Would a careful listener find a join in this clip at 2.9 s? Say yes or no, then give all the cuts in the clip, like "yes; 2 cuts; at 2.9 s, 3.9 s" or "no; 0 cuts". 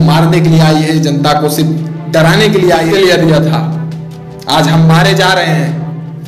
yes; 1 cut; at 2.9 s